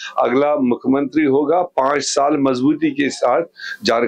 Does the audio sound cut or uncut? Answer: uncut